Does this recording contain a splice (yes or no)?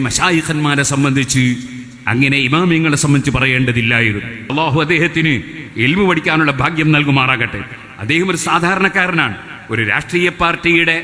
yes